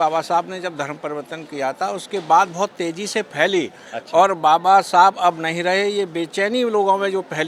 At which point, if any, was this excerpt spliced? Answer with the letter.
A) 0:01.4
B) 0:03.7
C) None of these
C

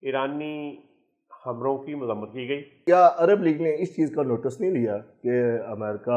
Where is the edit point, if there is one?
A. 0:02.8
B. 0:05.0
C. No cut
A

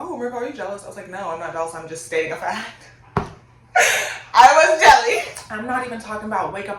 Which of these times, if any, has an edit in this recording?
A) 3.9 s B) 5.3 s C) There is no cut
B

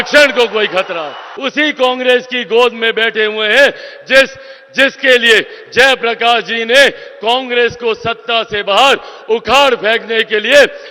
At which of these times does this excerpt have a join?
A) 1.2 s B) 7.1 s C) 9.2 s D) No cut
A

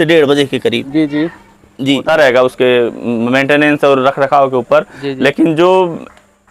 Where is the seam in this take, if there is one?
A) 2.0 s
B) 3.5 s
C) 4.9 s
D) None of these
A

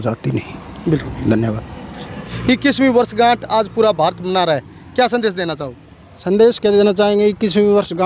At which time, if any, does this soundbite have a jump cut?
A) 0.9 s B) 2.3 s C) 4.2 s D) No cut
B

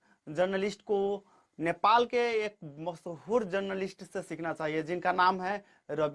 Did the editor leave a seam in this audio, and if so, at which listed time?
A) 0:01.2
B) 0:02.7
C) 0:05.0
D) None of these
D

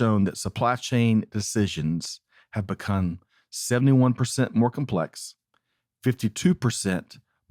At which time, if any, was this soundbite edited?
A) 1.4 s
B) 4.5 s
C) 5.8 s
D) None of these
D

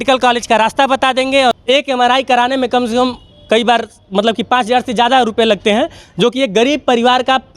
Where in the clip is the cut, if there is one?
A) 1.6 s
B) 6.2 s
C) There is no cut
A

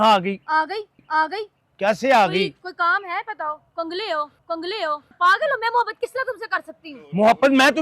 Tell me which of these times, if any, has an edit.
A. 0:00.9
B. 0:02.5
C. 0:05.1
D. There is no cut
C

